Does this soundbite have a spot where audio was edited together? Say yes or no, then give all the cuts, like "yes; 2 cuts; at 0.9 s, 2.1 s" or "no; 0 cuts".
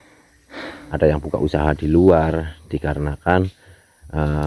yes; 1 cut; at 1.2 s